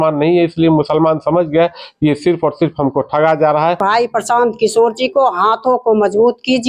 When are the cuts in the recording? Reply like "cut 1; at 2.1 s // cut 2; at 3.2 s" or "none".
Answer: cut 1; at 3.8 s